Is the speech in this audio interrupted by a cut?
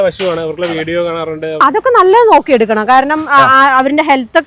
yes; 1 cut; at 1.6 s

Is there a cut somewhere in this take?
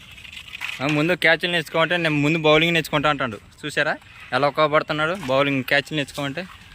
no; 0 cuts

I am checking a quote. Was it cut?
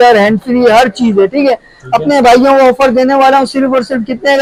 no; 0 cuts

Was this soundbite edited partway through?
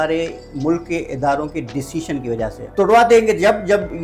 yes; 1 cut; at 2.6 s

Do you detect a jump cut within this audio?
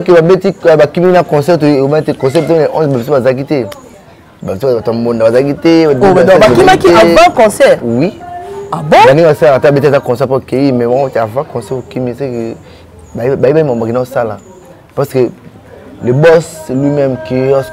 no; 0 cuts

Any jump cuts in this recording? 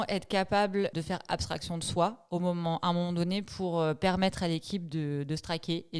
yes; 1 cut; at 0.9 s

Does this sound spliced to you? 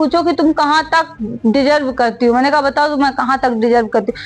no; 0 cuts

